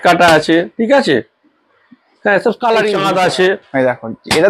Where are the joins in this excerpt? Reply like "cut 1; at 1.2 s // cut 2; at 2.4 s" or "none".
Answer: cut 1; at 3.0 s